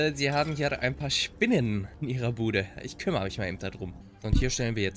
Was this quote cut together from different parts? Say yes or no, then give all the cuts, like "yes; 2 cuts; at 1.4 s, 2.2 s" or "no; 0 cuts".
yes; 2 cuts; at 1.9 s, 4.0 s